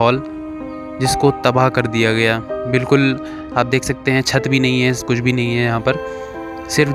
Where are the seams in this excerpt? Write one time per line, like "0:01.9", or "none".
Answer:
none